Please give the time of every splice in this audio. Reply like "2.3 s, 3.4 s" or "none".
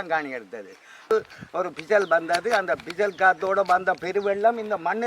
1.1 s

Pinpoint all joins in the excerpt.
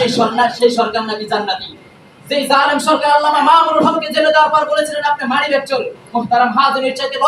1.9 s

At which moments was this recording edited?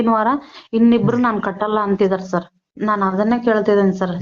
2.6 s

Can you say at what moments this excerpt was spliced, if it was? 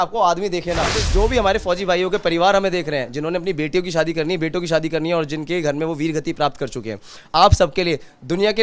1.0 s

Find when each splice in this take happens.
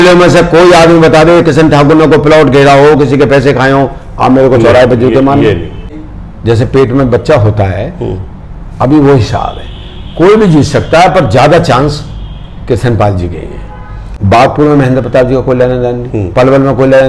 6.0 s, 14.1 s

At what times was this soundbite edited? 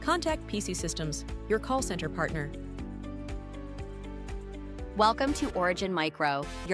4.9 s

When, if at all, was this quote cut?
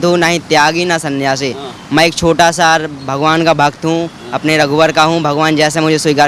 none

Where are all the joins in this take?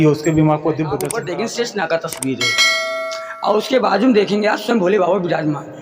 1.1 s

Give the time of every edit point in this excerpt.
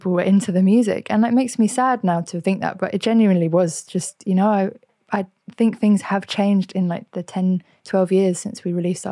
none

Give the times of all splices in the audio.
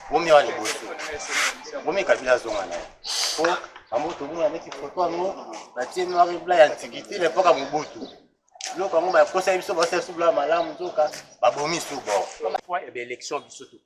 12.6 s

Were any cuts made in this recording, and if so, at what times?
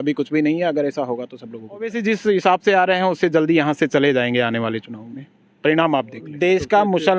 1.9 s, 6.3 s

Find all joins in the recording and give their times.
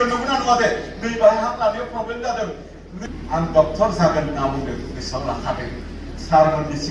3.0 s

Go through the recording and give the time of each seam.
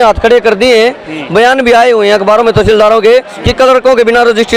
none

